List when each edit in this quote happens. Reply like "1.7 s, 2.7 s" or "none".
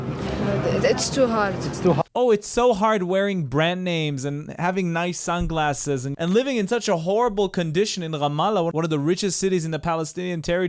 none